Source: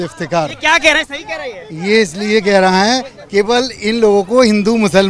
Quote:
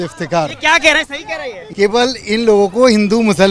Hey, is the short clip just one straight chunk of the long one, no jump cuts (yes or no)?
no